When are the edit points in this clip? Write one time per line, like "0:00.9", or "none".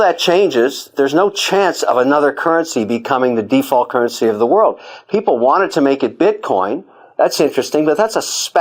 none